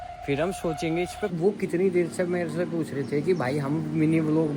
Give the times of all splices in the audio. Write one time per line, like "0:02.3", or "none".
0:01.3